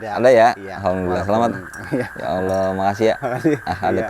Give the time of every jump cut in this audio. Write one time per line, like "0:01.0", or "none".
none